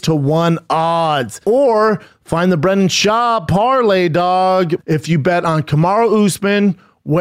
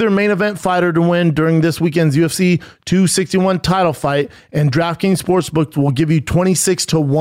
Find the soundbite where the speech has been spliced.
first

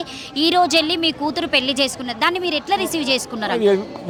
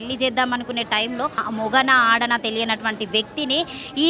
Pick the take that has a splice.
second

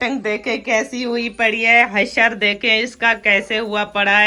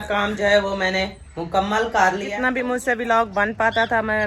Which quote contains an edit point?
second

